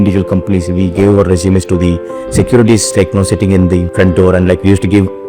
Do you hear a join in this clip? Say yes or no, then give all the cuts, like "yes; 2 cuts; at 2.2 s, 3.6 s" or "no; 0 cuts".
yes; 1 cut; at 3.9 s